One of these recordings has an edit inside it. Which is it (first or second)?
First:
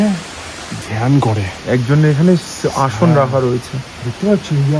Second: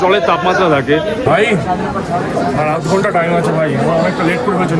second